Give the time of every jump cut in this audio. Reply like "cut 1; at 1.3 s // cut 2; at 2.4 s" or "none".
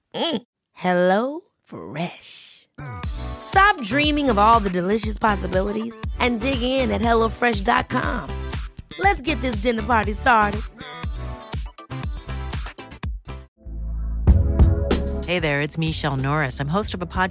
cut 1; at 13.6 s